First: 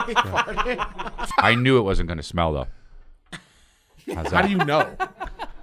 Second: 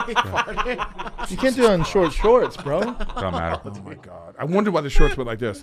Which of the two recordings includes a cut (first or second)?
first